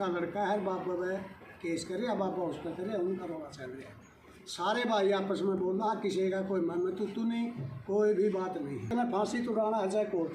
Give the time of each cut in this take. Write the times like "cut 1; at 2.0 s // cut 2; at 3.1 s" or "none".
cut 1; at 8.9 s